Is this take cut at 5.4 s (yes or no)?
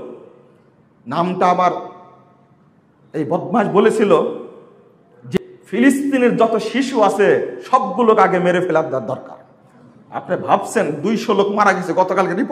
yes